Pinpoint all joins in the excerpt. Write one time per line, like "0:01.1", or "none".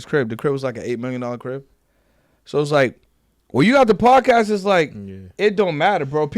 none